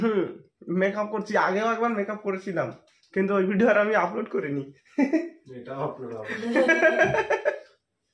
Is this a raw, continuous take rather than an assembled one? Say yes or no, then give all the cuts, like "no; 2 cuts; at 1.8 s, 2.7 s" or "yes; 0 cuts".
yes; 0 cuts